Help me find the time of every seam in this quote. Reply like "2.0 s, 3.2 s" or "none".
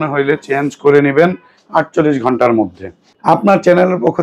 3.1 s